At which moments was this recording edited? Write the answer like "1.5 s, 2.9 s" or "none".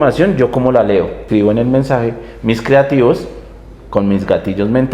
1.2 s